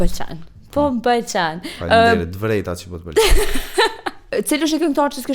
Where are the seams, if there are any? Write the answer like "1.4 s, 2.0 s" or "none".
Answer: 4.2 s